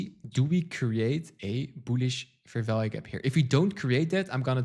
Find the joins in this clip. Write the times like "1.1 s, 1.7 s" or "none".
none